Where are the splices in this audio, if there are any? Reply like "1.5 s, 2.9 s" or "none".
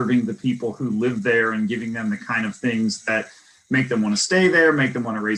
none